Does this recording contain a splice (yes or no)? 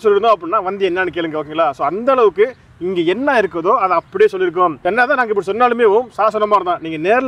no